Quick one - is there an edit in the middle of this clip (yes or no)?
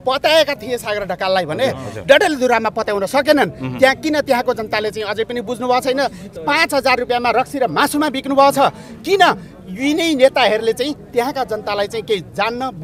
no